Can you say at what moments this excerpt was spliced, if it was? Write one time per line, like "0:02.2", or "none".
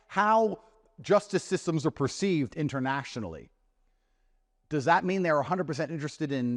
none